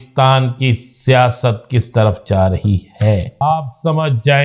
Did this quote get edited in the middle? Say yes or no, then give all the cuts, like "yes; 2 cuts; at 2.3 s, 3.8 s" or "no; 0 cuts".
yes; 1 cut; at 3.4 s